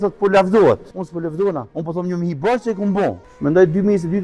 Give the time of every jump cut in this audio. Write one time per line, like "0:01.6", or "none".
0:01.5
0:03.3

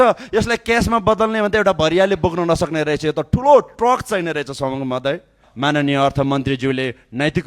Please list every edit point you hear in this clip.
0:05.5

